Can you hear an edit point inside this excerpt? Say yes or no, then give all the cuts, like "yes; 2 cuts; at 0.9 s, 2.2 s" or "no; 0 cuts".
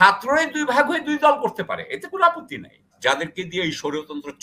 yes; 1 cut; at 2.9 s